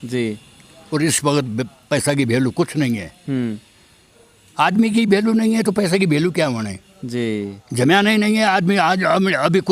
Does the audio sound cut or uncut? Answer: uncut